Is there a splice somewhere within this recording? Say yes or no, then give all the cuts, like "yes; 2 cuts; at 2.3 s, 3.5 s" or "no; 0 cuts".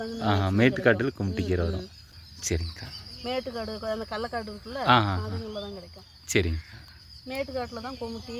no; 0 cuts